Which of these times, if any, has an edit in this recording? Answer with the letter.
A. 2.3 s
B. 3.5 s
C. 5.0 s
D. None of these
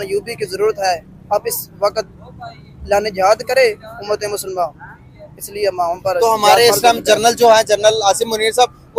D